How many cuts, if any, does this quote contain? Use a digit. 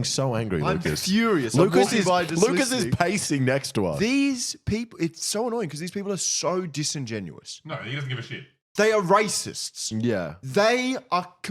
0